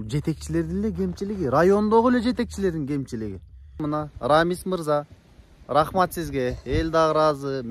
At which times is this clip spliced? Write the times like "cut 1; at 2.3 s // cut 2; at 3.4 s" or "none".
cut 1; at 3.8 s